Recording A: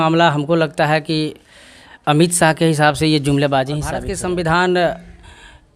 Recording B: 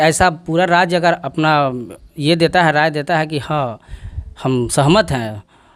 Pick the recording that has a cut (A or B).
A